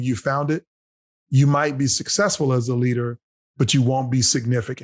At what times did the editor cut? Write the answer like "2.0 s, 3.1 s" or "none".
none